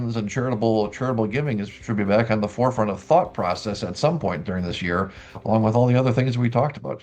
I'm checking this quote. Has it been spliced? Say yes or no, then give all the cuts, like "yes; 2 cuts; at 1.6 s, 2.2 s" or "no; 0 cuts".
no; 0 cuts